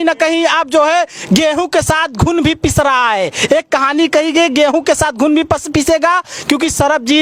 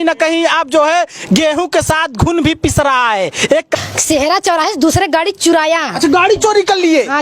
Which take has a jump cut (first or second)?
second